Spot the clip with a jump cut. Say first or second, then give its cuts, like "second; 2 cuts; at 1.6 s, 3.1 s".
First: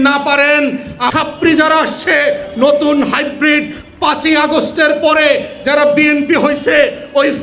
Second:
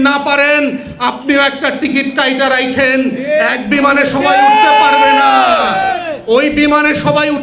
first; 1 cut; at 1.1 s